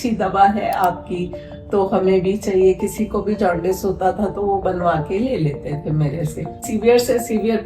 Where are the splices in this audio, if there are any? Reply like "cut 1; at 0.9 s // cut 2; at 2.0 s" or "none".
cut 1; at 6.7 s